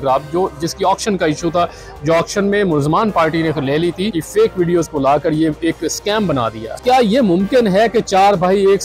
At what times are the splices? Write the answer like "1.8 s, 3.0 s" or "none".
4.2 s, 6.6 s